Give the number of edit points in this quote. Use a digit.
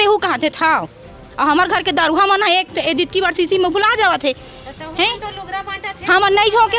0